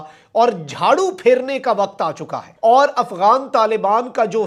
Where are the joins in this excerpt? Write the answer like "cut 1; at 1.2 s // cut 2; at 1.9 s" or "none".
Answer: none